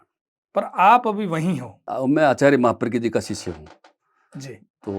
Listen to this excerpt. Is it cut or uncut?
cut